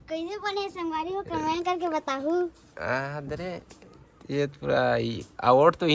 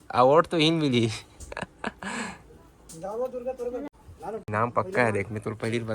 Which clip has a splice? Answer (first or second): second